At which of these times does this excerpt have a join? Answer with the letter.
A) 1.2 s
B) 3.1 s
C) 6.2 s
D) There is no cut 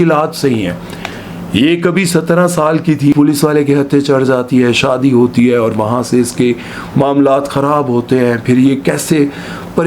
B